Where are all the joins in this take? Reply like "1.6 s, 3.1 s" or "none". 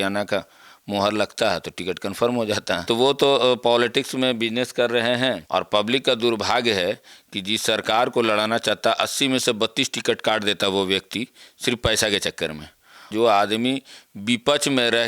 2.8 s, 5.4 s, 13.1 s